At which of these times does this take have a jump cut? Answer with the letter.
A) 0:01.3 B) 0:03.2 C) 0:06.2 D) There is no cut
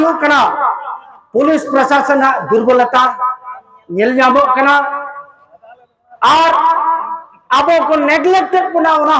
D